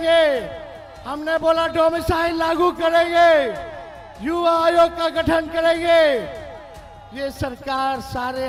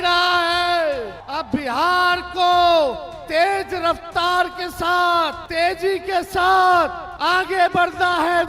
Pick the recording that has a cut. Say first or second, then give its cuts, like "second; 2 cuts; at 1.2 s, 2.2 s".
second; 3 cuts; at 1.2 s, 5.4 s, 7.1 s